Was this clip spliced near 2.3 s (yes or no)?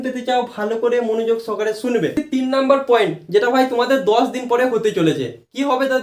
yes